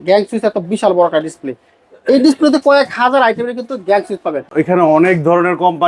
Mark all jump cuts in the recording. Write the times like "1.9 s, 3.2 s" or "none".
4.5 s